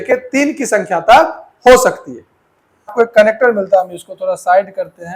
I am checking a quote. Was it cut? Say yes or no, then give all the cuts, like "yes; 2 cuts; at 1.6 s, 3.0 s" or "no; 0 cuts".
yes; 1 cut; at 2.9 s